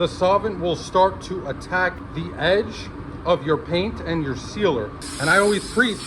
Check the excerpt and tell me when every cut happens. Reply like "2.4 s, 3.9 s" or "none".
5.0 s